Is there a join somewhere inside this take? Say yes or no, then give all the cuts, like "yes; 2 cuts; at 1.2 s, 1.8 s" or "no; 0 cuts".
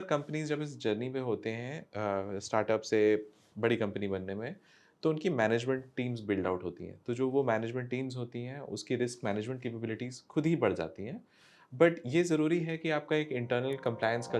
no; 0 cuts